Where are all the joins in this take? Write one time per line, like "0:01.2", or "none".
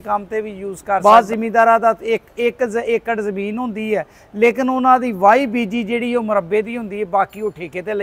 0:01.0

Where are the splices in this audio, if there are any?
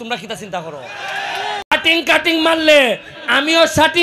none

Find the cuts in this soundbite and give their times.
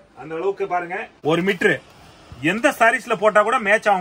0:01.1

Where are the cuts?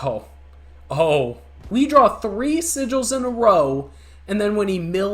0:01.6

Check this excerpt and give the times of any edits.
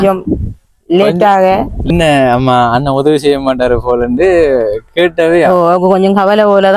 0:01.9

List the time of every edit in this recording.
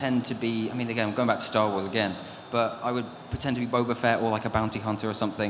none

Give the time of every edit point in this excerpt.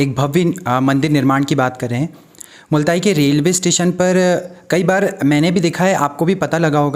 none

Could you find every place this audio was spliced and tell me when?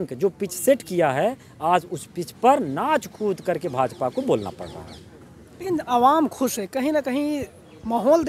none

